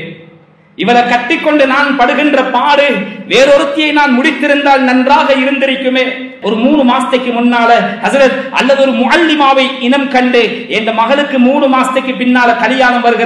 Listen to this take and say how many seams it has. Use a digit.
1